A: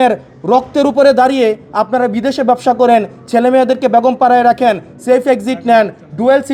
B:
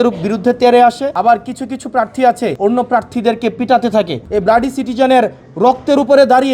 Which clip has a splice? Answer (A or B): B